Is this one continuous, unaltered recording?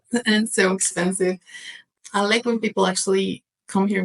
no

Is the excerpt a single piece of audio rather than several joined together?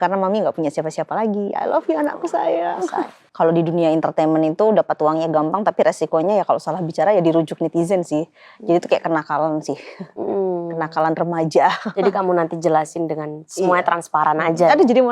no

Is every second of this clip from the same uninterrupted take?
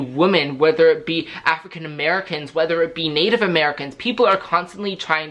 yes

